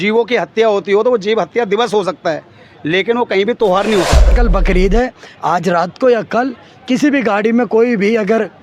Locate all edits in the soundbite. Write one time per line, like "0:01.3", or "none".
0:04.4